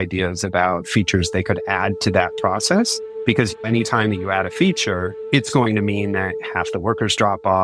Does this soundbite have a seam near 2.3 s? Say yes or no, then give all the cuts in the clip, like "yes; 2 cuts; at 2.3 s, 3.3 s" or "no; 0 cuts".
no; 2 cuts; at 3.5 s, 5.1 s